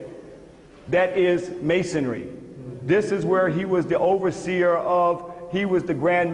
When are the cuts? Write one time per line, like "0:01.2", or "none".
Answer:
0:03.8